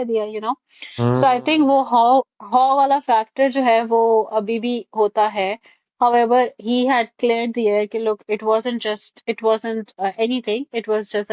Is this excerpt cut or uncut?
uncut